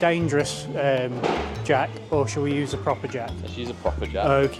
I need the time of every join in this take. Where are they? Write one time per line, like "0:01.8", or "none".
none